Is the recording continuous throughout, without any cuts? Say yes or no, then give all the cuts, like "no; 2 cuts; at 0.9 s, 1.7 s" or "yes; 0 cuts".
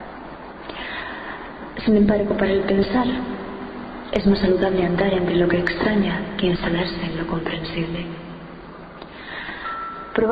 no; 1 cut; at 8.4 s